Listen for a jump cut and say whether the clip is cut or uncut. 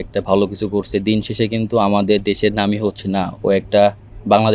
uncut